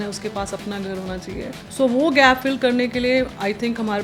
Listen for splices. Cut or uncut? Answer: cut